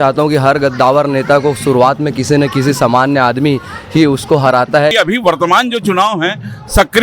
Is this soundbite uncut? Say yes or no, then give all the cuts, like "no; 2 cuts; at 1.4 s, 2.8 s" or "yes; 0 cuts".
no; 1 cut; at 4.9 s